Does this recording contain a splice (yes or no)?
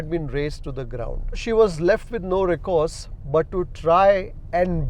yes